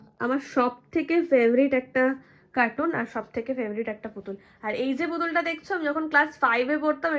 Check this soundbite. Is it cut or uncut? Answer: uncut